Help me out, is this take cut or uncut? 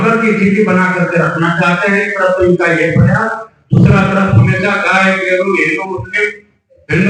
uncut